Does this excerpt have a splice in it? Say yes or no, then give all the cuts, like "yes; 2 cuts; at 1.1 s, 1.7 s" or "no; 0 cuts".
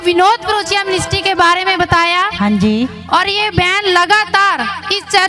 yes; 1 cut; at 2.3 s